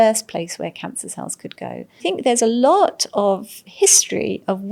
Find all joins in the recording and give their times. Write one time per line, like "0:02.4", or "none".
0:02.0